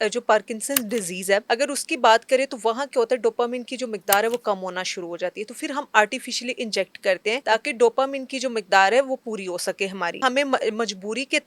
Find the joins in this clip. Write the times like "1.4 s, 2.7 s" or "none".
1.4 s, 7.4 s, 10.2 s